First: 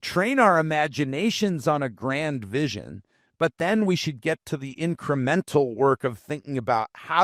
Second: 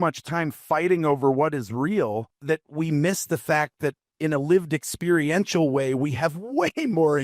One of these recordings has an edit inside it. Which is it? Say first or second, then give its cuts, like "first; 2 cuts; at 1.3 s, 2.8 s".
second; 2 cuts; at 2.3 s, 4.1 s